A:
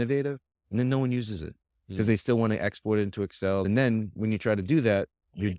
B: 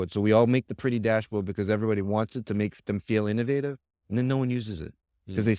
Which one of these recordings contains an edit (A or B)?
A